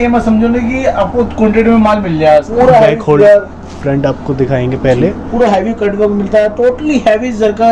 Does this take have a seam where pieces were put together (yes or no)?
yes